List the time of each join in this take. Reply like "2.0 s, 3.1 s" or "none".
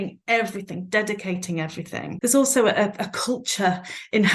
2.1 s